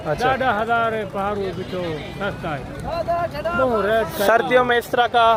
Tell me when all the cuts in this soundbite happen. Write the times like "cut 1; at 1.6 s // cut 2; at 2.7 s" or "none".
none